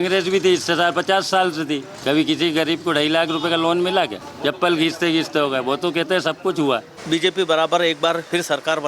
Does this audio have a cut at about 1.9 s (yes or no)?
yes